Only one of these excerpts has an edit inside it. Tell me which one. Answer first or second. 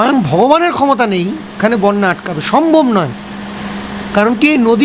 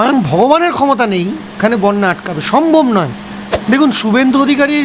second